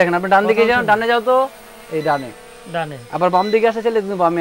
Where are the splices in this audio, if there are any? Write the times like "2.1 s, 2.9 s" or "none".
none

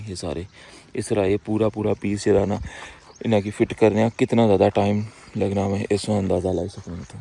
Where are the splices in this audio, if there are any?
none

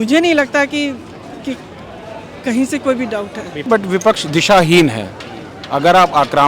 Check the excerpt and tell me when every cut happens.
3.6 s

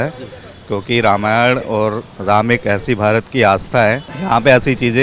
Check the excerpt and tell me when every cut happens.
4.1 s

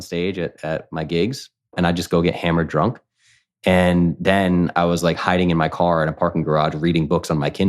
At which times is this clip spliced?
1.7 s

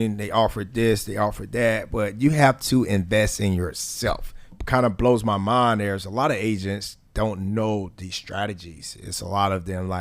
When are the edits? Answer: 4.5 s

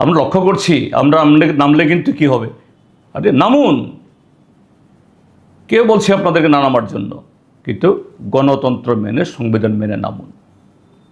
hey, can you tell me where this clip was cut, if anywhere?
none

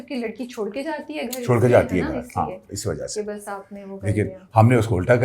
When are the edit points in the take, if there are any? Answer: none

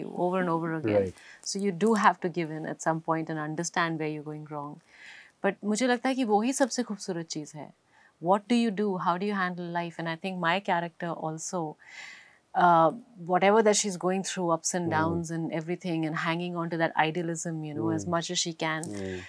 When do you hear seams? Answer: none

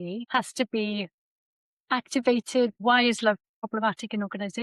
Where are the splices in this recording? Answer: 2.8 s, 3.7 s

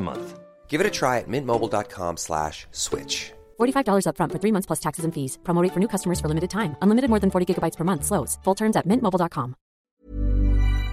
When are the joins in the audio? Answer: 9.9 s

